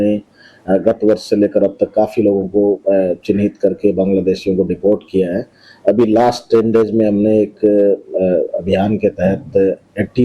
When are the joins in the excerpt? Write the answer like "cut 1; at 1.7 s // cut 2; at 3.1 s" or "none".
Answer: cut 1; at 9.2 s

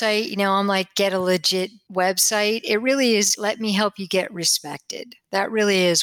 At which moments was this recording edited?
cut 1; at 1.8 s // cut 2; at 3.3 s

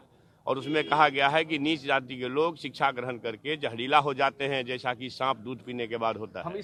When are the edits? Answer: none

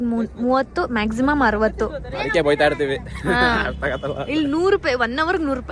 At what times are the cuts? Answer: none

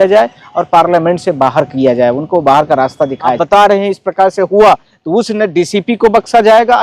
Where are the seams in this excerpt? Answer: cut 1; at 3.4 s

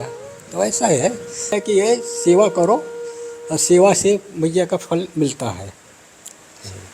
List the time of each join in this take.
cut 1; at 1.6 s

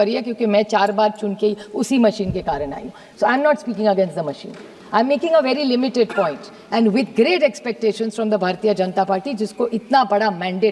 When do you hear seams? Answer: none

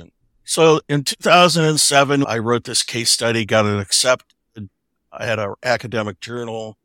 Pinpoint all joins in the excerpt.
cut 1; at 2.2 s

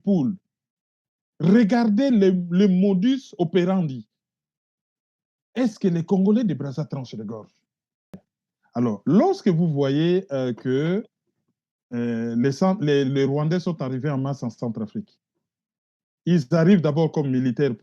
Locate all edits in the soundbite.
cut 1; at 8.3 s

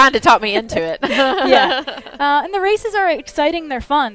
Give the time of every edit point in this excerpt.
cut 1; at 3.2 s

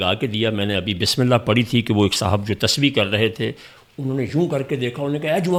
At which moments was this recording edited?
none

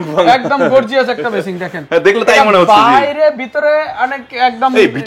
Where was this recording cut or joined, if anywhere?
none

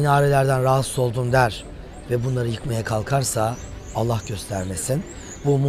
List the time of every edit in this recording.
none

